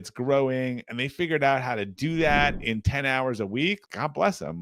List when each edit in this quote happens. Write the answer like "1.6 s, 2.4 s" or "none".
none